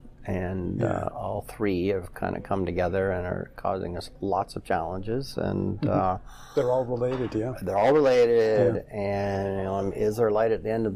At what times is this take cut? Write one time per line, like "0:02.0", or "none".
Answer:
none